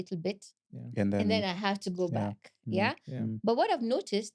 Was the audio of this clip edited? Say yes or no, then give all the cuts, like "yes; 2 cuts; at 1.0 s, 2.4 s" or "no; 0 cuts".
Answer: no; 0 cuts